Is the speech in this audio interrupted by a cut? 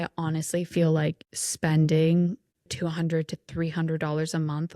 yes; 1 cut; at 2.7 s

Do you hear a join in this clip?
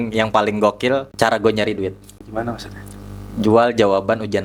yes; 2 cuts; at 1.1 s, 2.1 s

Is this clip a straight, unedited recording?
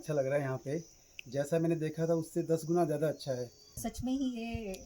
no; 1 cut; at 3.7 s

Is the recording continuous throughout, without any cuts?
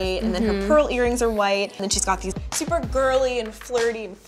yes; 0 cuts

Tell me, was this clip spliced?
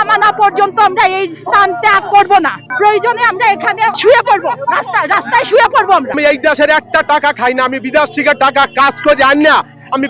yes; 3 cuts; at 2.6 s, 3.9 s, 6.1 s

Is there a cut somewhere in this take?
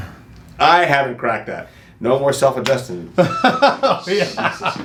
no; 0 cuts

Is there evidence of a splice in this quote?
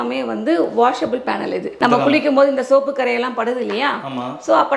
no; 0 cuts

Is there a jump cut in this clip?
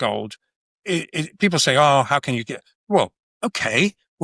yes; 1 cut; at 3.2 s

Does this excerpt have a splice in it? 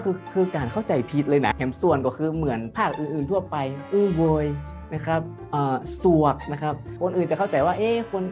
yes; 2 cuts; at 1.5 s, 3.8 s

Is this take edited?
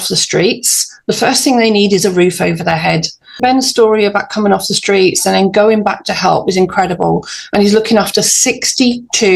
yes; 1 cut; at 3.4 s

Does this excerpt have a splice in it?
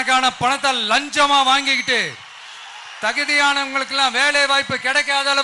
no; 0 cuts

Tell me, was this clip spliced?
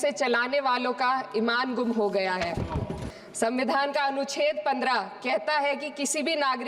yes; 1 cut; at 3.0 s

